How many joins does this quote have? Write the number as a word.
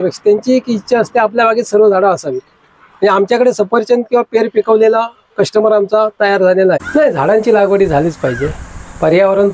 one